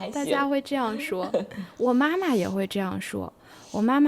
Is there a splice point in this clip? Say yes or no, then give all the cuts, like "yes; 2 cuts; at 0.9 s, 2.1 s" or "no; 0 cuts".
no; 0 cuts